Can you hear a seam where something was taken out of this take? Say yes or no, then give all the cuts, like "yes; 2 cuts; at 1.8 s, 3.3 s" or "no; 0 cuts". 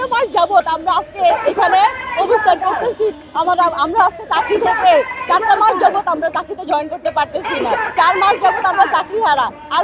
no; 0 cuts